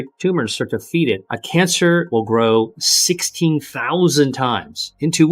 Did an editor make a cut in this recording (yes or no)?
yes